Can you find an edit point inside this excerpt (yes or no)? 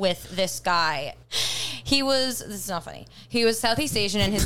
yes